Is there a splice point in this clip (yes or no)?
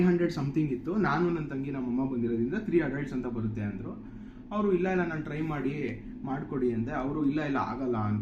no